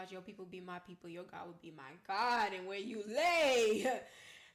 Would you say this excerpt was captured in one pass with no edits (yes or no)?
yes